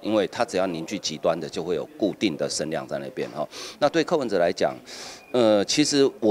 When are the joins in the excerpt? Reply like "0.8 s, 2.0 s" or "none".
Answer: none